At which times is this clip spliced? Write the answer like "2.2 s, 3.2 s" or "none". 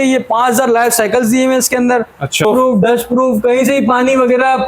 2.4 s